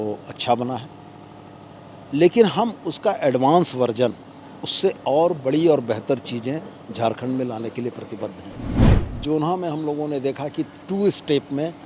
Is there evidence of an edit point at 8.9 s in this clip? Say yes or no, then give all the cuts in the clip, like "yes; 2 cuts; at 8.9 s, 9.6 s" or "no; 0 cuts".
yes; 1 cut; at 8.9 s